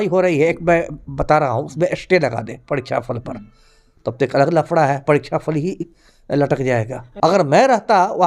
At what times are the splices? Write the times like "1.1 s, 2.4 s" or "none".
7.0 s